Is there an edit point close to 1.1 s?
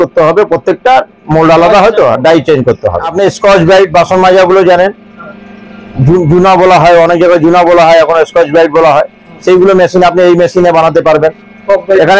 no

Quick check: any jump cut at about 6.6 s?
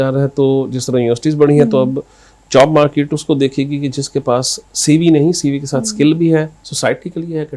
yes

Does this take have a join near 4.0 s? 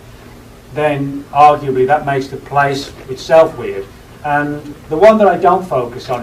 no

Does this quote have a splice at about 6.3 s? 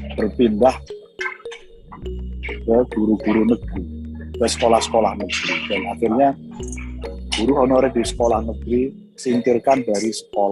no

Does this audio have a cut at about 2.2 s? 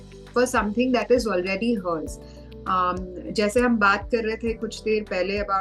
no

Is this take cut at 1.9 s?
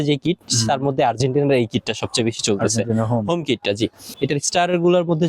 no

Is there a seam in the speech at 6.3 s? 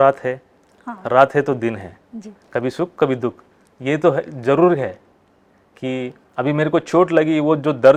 no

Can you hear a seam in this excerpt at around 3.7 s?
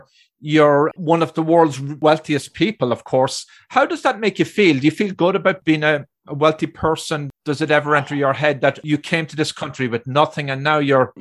no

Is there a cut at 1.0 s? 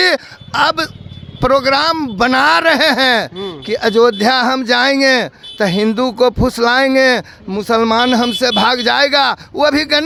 no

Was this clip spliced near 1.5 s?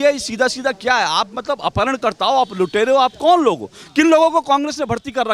no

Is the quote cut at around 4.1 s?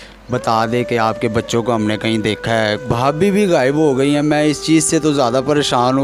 no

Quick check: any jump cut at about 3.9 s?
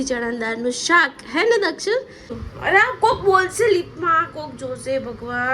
no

